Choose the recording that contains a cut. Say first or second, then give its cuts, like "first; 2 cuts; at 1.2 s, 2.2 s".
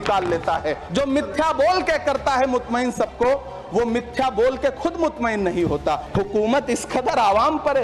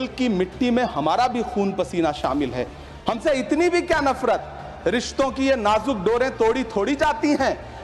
first; 2 cuts; at 0.8 s, 6.1 s